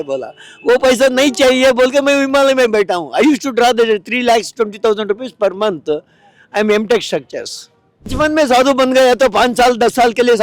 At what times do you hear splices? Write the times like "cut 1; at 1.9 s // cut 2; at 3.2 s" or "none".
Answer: cut 1; at 8.1 s